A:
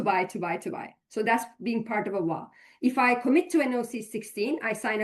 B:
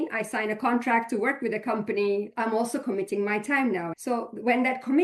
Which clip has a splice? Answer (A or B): B